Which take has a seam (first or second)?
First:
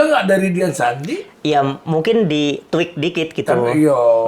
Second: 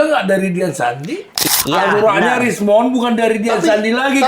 second